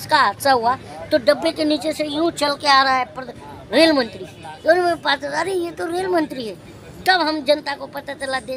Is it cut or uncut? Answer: uncut